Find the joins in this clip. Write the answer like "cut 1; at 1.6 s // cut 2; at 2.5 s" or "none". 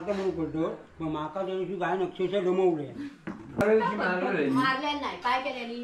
cut 1; at 3.6 s